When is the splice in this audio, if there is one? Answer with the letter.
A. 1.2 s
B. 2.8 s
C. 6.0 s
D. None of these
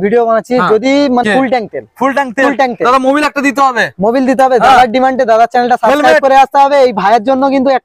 A